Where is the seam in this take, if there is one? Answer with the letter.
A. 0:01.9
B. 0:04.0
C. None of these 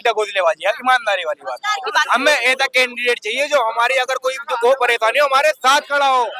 C